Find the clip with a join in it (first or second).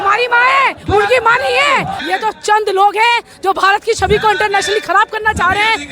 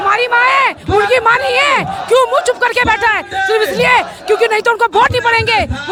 first